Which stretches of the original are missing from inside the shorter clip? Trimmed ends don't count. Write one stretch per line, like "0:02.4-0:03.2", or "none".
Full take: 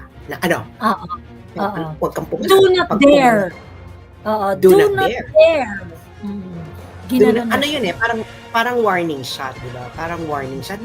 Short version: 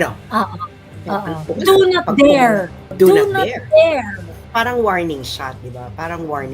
0:01.9-0:02.3
0:03.7-0:04.5
0:06.0-0:08.3